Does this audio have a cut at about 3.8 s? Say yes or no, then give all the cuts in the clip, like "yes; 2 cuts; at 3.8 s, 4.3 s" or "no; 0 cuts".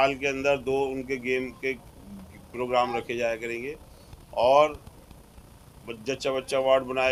no; 0 cuts